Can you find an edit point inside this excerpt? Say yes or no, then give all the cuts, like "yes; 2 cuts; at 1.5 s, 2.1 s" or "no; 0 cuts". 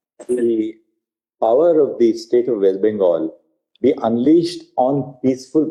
no; 0 cuts